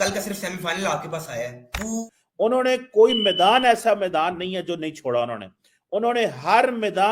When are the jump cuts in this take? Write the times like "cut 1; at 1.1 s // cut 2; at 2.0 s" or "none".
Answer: cut 1; at 2.1 s